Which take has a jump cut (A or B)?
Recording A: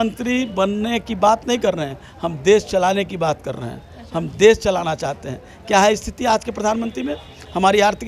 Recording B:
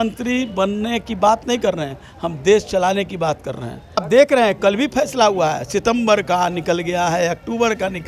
B